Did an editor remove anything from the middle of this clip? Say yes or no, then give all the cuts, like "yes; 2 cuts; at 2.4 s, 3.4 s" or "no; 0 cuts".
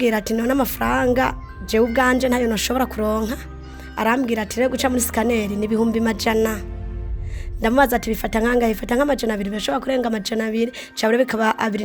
no; 0 cuts